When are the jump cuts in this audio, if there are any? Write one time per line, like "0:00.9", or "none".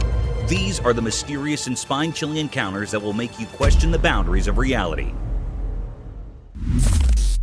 0:06.4